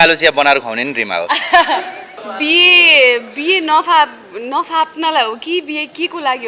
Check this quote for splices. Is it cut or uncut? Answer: cut